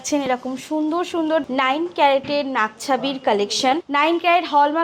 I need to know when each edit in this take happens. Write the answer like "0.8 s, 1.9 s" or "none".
1.4 s, 3.8 s